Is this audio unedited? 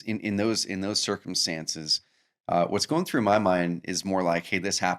yes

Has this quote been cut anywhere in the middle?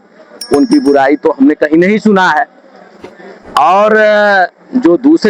no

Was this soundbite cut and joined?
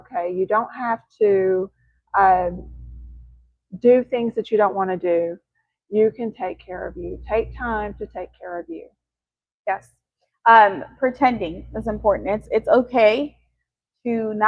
no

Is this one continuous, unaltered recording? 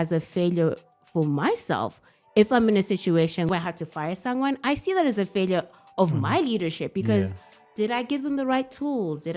no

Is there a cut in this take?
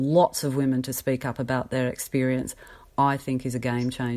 no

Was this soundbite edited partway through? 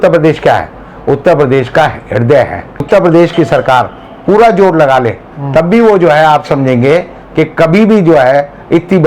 yes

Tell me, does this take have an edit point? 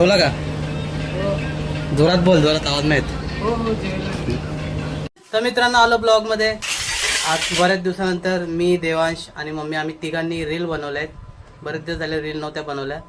yes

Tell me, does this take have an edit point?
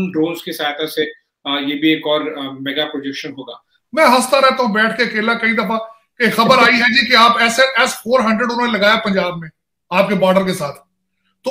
yes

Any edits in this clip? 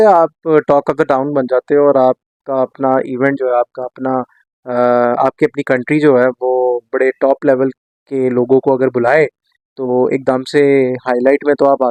no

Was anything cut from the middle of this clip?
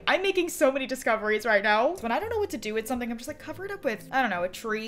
yes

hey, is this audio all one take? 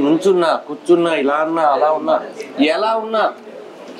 yes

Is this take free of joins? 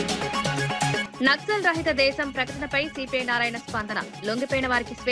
yes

